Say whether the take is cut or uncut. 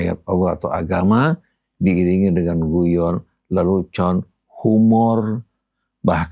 uncut